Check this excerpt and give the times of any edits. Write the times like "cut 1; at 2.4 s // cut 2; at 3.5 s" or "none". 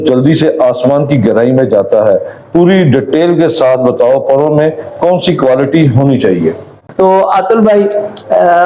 cut 1; at 6.8 s

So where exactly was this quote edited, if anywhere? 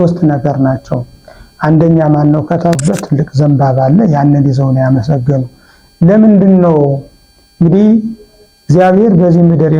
cut 1; at 2.8 s

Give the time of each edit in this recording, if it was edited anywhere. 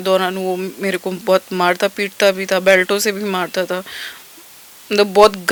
none

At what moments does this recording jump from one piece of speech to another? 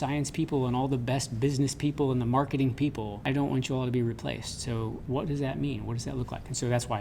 cut 1; at 3.3 s // cut 2; at 5.0 s

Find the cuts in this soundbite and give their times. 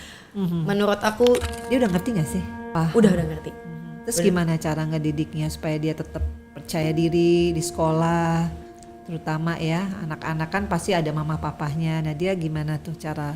cut 1; at 1.4 s // cut 2; at 2.7 s

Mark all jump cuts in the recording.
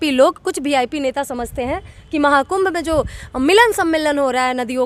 none

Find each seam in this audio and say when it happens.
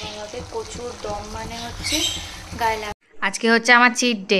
cut 1; at 3.0 s

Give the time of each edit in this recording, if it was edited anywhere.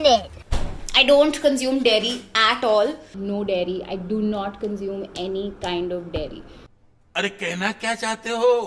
none

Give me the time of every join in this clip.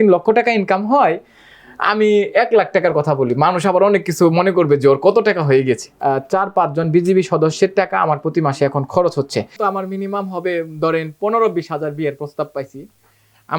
cut 1; at 6.0 s // cut 2; at 9.5 s

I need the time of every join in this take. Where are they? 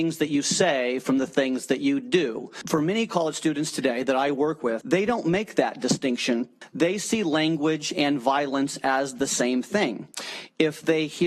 cut 1; at 2.5 s // cut 2; at 6.6 s

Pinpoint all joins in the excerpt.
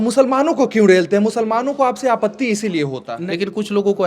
cut 1; at 3.1 s

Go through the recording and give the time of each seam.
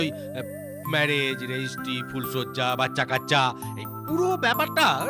none

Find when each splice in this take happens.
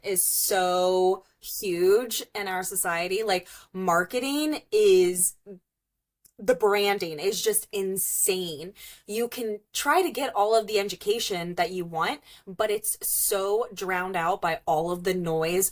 none

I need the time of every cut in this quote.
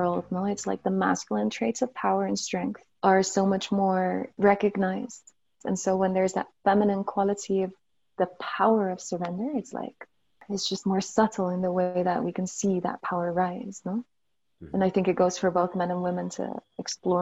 cut 1; at 2.9 s // cut 2; at 4.3 s // cut 3; at 5.6 s // cut 4; at 10.4 s

